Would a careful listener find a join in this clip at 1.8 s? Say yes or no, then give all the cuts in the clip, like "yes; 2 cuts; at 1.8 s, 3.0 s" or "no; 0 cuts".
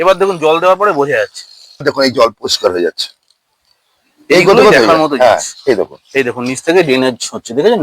yes; 1 cut; at 1.8 s